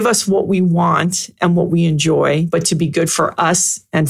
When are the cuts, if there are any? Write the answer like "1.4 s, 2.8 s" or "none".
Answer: 2.5 s